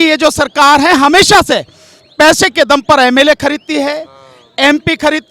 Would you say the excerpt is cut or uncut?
uncut